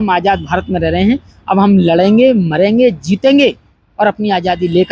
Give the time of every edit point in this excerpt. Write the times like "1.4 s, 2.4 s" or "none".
none